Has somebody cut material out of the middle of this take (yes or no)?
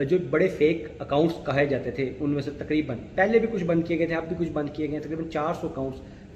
yes